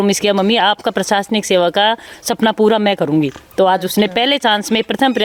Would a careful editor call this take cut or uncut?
uncut